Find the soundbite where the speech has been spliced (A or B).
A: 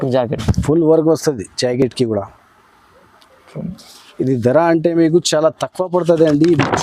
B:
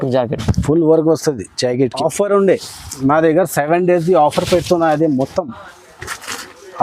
B